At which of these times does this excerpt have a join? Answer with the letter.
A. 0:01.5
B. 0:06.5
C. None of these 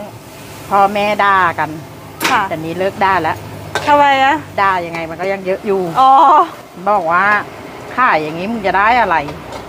B